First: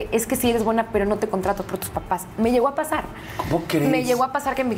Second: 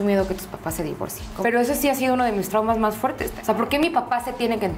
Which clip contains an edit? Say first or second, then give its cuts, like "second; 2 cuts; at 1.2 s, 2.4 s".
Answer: second; 2 cuts; at 1.2 s, 3.3 s